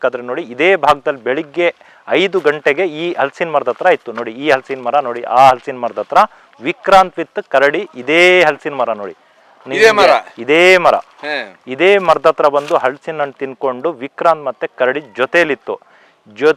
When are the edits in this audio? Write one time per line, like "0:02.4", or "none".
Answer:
none